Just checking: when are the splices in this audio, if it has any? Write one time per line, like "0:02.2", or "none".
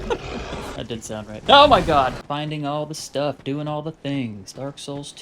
0:01.2
0:02.2